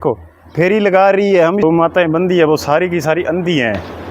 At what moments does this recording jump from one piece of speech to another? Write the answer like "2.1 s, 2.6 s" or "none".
1.6 s